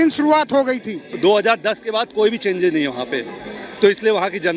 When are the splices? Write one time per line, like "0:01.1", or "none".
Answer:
0:01.1